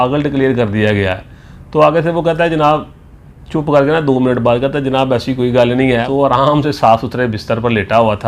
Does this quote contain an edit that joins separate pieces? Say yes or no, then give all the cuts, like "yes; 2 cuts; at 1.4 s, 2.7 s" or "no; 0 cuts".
yes; 1 cut; at 6.1 s